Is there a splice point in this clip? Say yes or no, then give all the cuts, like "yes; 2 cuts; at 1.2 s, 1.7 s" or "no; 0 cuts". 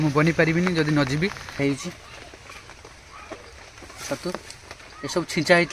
yes; 1 cut; at 1.6 s